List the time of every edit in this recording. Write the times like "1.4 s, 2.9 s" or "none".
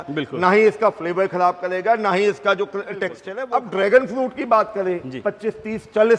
3.3 s